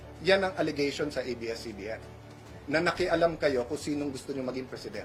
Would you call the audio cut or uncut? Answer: uncut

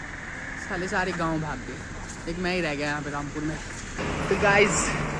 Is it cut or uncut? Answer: cut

